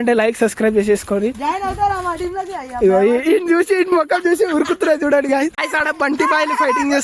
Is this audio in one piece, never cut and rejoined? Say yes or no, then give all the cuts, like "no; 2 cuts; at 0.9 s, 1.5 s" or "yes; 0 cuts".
no; 1 cut; at 5.6 s